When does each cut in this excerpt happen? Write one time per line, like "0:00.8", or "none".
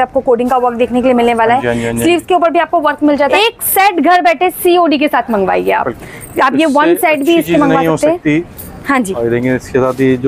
0:03.3